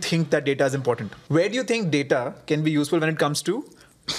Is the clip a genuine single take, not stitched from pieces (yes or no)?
no